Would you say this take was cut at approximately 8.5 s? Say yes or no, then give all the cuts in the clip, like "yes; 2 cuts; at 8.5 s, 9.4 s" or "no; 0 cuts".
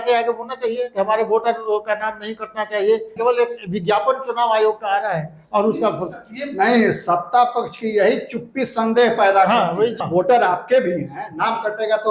no; 2 cuts; at 3.1 s, 10.0 s